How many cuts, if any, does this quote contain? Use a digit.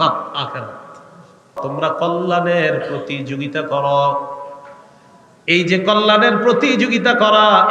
1